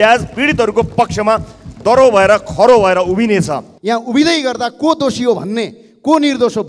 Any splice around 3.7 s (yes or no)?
yes